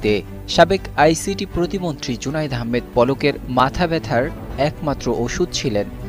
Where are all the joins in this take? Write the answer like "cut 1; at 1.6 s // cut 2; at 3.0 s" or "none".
none